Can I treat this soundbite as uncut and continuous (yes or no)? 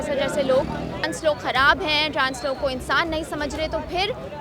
no